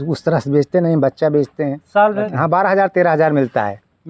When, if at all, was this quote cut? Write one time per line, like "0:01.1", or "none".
0:02.3